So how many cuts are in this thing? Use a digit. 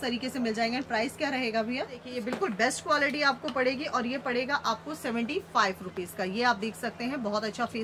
1